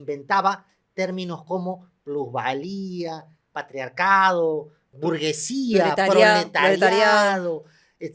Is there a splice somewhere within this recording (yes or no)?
yes